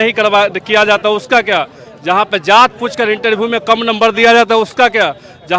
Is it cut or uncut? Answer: uncut